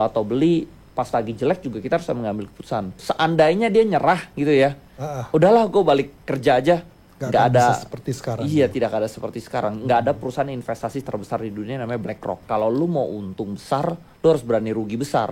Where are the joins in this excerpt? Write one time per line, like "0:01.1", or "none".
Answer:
0:03.0
0:12.4